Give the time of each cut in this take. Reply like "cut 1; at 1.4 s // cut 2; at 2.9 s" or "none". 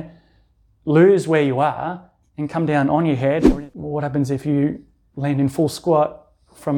cut 1; at 3.5 s